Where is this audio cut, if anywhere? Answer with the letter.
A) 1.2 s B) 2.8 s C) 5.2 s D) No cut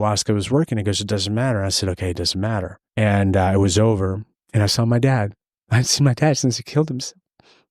B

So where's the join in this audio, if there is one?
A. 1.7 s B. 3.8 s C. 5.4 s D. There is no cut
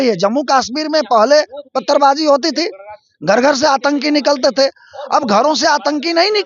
D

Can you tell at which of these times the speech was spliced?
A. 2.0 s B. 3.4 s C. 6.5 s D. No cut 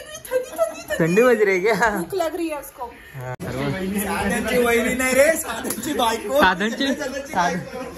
B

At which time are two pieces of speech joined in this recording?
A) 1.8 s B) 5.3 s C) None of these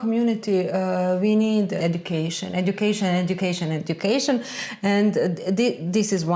A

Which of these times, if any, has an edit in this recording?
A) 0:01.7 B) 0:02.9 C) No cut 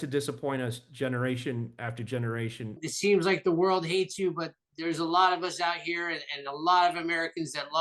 B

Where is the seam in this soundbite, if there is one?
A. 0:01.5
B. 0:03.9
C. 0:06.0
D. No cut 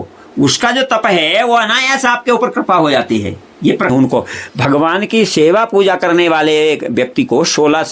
B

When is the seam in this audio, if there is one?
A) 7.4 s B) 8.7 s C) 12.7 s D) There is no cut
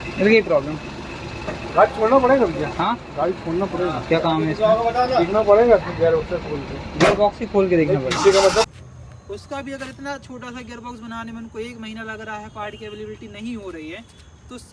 B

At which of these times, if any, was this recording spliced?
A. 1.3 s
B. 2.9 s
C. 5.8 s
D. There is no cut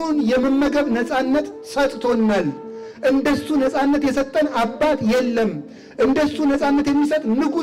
D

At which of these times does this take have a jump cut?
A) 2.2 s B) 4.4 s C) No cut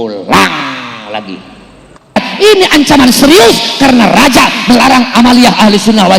A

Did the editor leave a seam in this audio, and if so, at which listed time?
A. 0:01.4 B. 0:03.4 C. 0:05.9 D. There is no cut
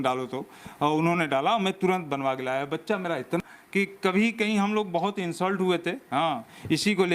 B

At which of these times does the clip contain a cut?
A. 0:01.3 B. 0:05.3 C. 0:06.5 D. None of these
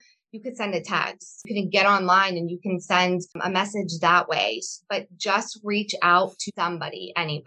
C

